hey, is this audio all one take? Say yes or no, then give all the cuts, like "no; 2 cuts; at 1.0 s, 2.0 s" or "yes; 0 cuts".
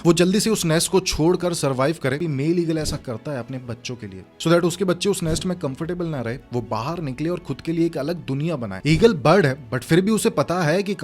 no; 1 cut; at 2.2 s